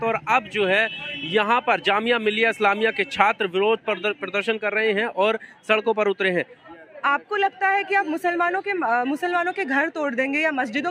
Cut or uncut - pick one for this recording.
cut